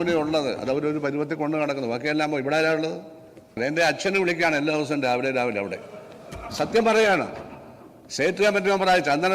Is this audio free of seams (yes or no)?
no